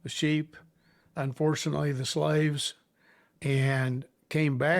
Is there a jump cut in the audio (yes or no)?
no